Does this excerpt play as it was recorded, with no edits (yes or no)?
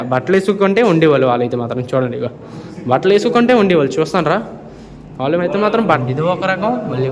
no